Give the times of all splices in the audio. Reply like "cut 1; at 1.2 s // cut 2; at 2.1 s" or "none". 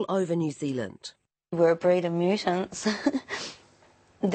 cut 1; at 1.5 s